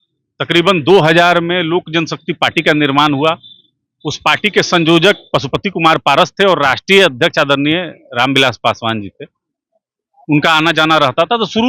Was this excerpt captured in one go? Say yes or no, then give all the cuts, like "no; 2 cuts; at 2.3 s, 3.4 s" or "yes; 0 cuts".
yes; 0 cuts